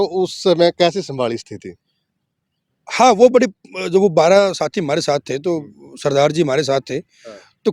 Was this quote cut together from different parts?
no; 0 cuts

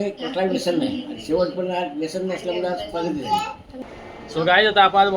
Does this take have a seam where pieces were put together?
yes; 1 cut; at 3.7 s

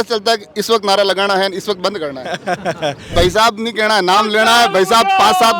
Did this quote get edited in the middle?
yes; 1 cut; at 3.1 s

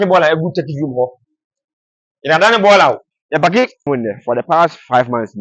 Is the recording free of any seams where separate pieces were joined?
no; 1 cut; at 3.8 s

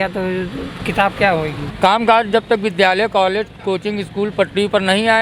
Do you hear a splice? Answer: yes; 1 cut; at 1.6 s

